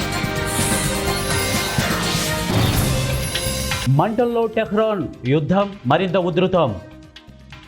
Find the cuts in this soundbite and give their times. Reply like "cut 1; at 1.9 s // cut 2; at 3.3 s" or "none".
cut 1; at 3.8 s